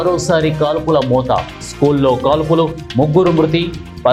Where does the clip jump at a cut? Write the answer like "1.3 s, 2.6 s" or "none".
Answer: none